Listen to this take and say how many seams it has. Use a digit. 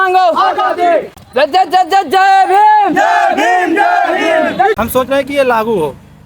2